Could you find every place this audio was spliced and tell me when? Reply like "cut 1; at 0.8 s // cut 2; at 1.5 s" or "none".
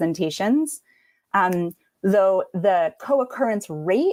none

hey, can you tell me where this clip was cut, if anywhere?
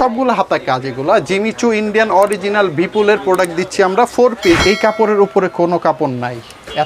cut 1; at 4.6 s

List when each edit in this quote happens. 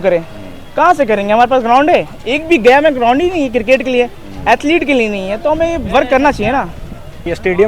none

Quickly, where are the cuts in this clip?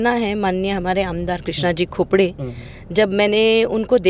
none

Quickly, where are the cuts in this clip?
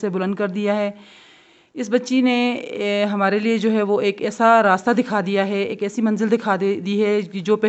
none

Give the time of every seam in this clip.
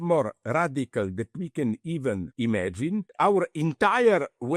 cut 1; at 2.3 s // cut 2; at 3.1 s

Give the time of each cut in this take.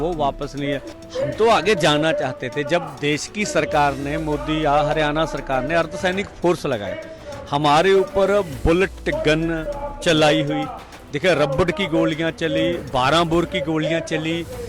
cut 1; at 1.0 s

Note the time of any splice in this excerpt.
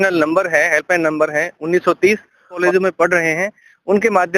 cut 1; at 2.6 s

